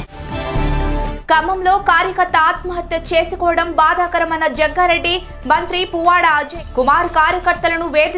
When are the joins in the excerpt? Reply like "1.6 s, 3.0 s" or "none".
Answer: 1.1 s